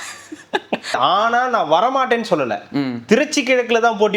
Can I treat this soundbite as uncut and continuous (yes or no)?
no